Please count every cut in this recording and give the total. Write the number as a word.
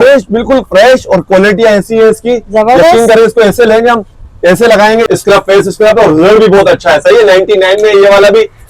one